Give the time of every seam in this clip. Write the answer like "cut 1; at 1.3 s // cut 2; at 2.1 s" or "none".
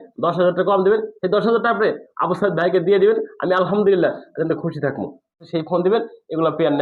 cut 1; at 5.4 s